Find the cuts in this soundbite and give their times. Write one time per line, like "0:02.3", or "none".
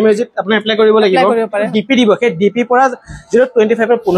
0:01.7